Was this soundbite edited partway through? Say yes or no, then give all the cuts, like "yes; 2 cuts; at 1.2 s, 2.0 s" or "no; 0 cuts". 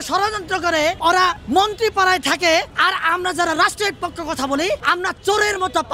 yes; 3 cuts; at 1.1 s, 2.7 s, 4.8 s